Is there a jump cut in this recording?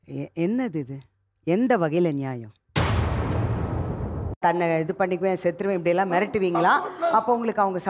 yes; 2 cuts; at 2.7 s, 4.3 s

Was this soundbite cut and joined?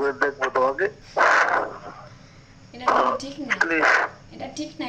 yes; 1 cut; at 1.0 s

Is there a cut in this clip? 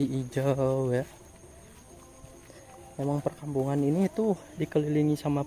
no; 0 cuts

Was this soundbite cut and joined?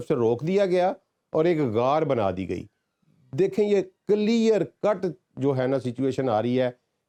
no; 0 cuts

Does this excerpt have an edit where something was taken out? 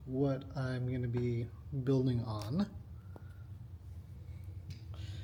no; 0 cuts

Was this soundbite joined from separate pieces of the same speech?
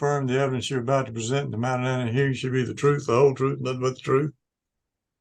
no; 0 cuts

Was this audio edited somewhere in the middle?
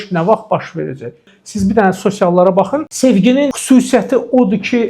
yes; 3 cuts; at 1.3 s, 2.9 s, 3.6 s

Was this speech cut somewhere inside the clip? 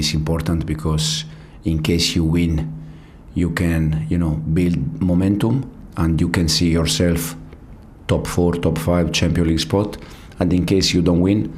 no; 0 cuts

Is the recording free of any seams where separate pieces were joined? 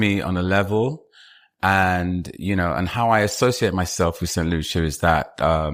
yes; 0 cuts

